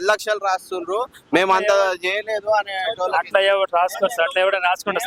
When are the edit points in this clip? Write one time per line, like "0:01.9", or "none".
none